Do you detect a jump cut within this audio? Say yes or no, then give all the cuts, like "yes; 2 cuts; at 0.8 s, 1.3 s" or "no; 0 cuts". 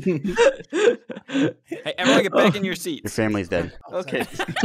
no; 0 cuts